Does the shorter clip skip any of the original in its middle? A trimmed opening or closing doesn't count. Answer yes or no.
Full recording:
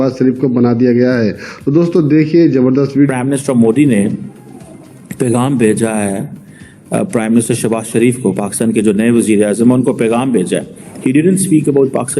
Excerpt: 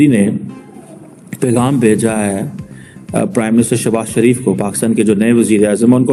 no